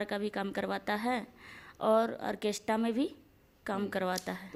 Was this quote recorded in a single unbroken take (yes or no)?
yes